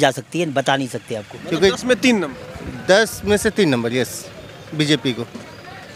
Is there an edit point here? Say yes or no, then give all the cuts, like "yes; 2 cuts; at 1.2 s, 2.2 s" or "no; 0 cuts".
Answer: yes; 1 cut; at 1.3 s